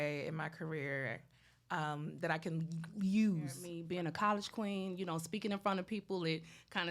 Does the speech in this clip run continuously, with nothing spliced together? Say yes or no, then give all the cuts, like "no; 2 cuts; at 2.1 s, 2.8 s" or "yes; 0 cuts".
no; 1 cut; at 3.7 s